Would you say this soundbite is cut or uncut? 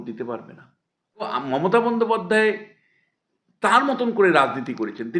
cut